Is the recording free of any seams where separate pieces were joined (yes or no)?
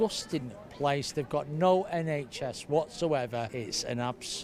yes